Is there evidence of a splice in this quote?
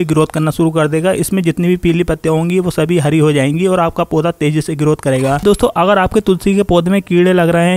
yes; 1 cut; at 5.4 s

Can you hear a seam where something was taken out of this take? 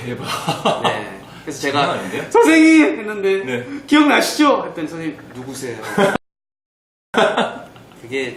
no; 0 cuts

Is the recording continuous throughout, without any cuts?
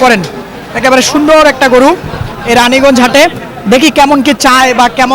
yes; 0 cuts

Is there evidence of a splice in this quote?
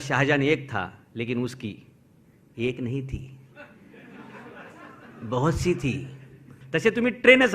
yes; 1 cut; at 6.6 s

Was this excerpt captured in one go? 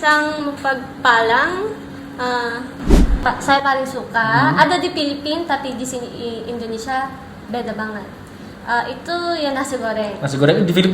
no; 1 cut; at 3.2 s

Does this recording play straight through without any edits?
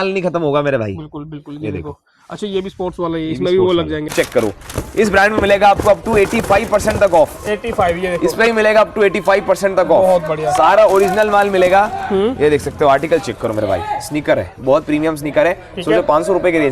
no; 1 cut; at 4.1 s

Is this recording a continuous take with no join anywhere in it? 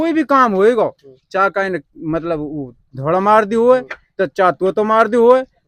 yes; 0 cuts

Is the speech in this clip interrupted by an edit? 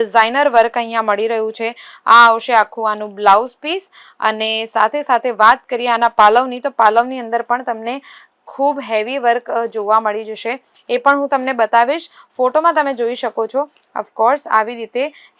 no; 0 cuts

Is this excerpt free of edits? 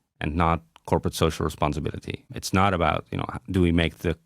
no; 1 cut; at 2.3 s

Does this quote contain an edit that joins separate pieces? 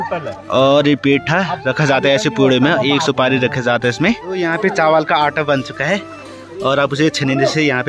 yes; 1 cut; at 4.3 s

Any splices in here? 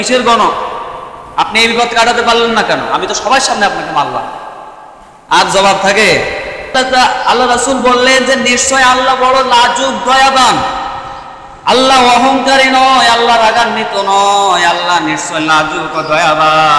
yes; 1 cut; at 6.7 s

